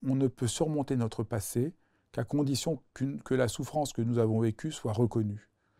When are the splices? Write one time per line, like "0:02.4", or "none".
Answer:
none